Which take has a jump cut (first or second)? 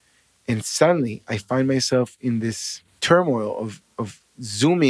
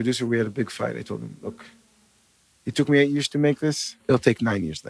second